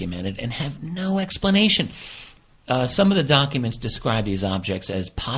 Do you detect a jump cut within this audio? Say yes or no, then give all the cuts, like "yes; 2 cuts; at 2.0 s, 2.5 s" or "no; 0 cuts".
yes; 1 cut; at 2.8 s